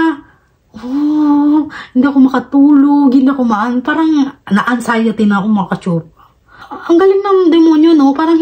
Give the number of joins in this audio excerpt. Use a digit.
1